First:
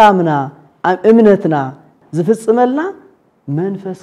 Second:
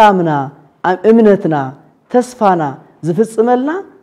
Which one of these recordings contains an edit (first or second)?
first